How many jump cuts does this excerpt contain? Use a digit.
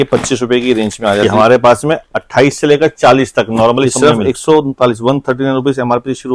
2